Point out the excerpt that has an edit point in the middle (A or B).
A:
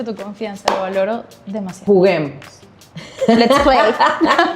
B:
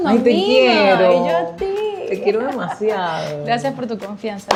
A